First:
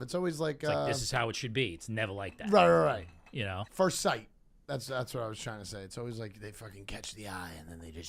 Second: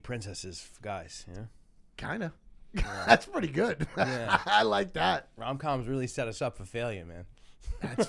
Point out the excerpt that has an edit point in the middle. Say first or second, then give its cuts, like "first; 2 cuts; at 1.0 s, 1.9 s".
first; 1 cut; at 3.6 s